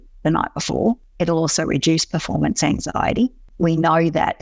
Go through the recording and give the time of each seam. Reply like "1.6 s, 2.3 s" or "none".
1.1 s, 3.5 s